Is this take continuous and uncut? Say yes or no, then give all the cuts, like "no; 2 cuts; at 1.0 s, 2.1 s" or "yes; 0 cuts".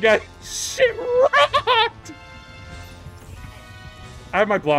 yes; 0 cuts